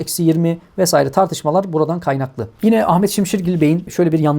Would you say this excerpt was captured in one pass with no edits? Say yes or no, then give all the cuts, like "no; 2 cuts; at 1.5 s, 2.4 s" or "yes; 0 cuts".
no; 1 cut; at 2.4 s